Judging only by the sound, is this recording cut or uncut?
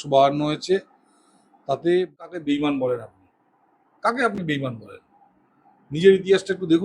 cut